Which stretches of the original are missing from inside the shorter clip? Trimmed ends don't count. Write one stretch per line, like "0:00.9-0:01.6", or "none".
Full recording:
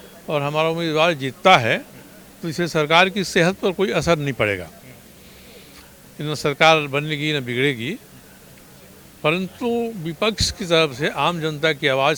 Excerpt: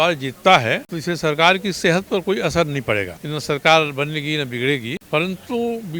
0:01.9-0:02.4
0:04.7-0:06.1
0:08.0-0:09.1